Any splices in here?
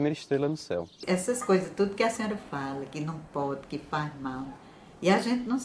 yes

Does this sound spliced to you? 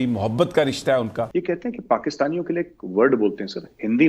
yes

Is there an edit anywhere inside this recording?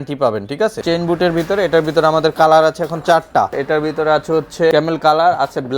yes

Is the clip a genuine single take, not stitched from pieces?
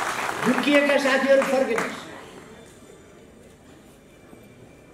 yes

